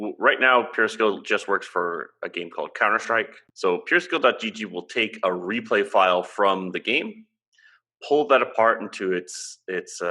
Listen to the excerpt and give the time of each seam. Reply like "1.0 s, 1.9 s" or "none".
3.4 s